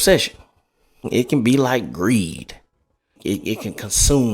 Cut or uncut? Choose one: cut